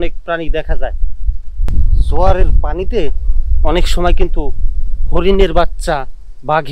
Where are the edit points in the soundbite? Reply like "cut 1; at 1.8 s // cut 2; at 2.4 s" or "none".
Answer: cut 1; at 1.7 s